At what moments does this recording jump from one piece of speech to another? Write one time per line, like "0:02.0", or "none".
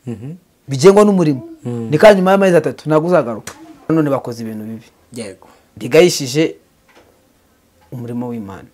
0:03.9